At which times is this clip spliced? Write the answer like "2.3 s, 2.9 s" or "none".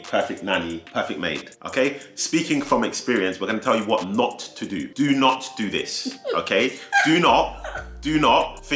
none

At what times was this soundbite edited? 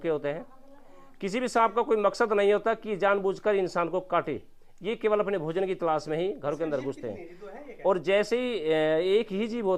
none

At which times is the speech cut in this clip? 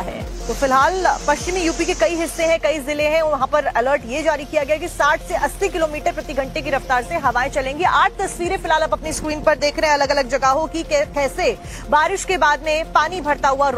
12.6 s

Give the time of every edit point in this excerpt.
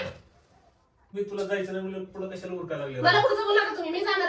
1.1 s

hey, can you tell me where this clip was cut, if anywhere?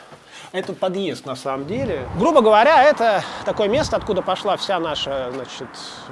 2.0 s

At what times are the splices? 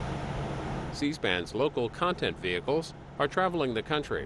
0.9 s

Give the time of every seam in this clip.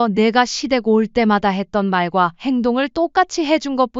none

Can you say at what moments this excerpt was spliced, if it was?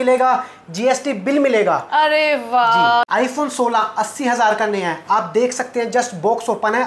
3.1 s

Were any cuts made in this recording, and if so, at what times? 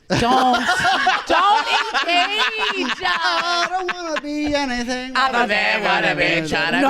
none

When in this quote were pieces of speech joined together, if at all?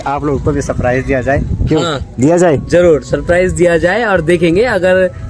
none

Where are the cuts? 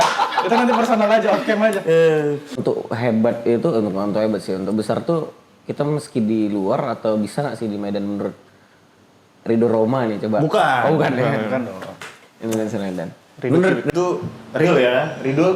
2.6 s, 13.9 s

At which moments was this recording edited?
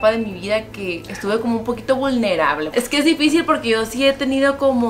2.7 s

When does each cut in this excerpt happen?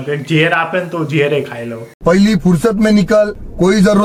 none

